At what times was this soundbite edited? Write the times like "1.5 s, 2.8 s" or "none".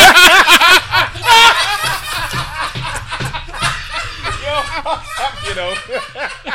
none

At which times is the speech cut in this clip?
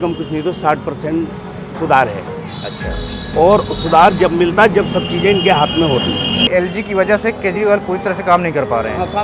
6.5 s

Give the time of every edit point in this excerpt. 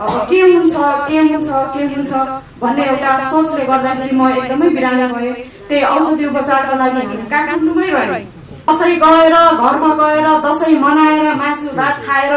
8.7 s

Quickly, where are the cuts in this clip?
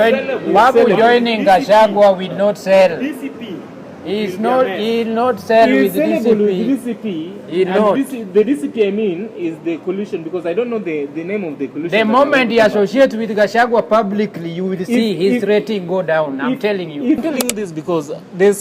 17.2 s

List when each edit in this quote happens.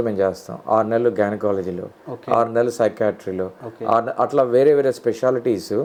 none

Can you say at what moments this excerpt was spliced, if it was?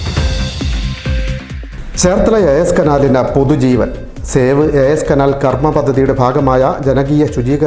1.3 s

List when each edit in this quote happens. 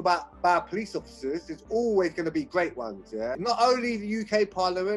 3.4 s

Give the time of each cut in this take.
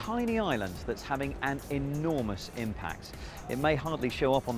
none

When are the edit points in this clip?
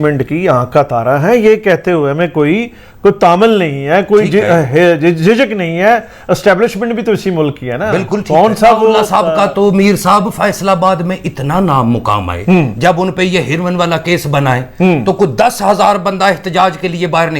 9.0 s

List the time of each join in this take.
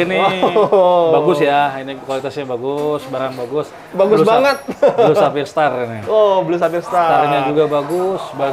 none

